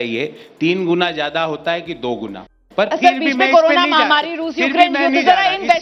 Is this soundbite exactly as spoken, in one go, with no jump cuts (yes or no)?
yes